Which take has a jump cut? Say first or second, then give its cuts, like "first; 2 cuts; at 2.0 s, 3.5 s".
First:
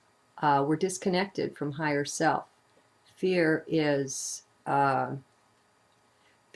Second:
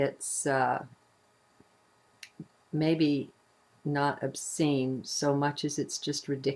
first; 1 cut; at 5.0 s